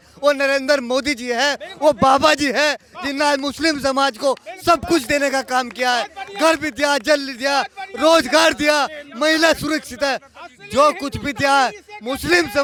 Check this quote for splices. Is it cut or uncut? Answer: uncut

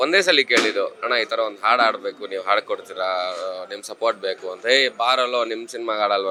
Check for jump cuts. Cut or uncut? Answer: uncut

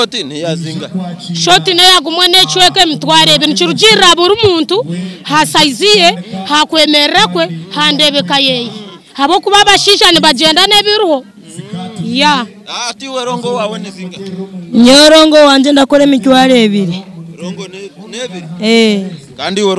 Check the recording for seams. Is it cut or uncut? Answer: uncut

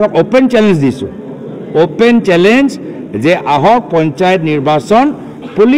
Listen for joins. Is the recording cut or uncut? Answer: uncut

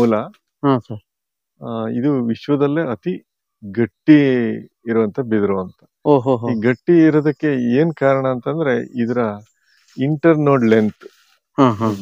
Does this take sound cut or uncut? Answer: uncut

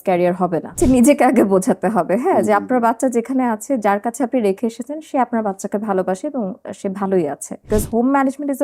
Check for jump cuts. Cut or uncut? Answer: cut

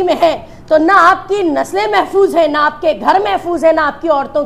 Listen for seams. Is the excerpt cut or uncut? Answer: uncut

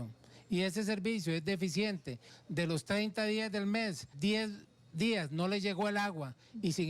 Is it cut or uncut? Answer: cut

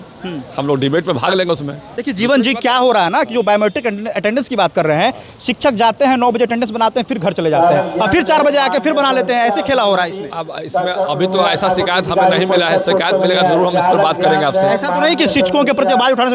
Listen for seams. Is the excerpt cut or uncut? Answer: cut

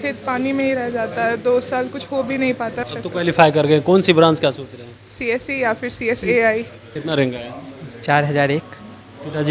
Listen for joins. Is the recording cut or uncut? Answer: cut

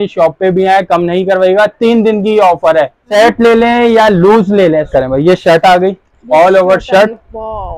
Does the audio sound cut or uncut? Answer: cut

